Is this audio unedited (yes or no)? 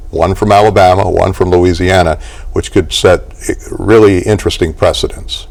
yes